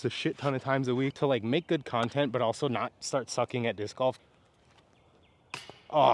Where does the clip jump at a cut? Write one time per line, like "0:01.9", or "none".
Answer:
0:01.1
0:04.2